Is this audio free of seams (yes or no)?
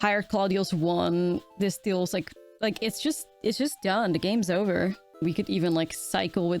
no